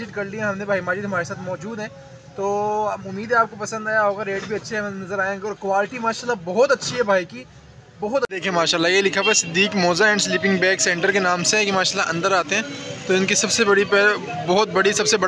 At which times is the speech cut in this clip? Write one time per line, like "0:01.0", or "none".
0:08.4